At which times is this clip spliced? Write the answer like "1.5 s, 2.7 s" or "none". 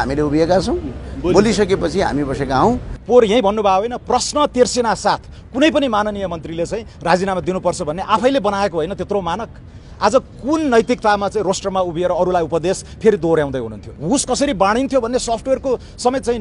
2.9 s, 13.9 s